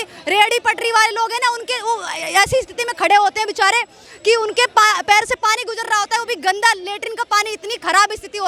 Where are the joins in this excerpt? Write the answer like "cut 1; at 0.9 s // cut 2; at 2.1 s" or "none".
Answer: none